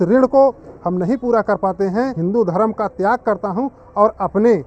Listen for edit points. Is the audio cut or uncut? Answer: cut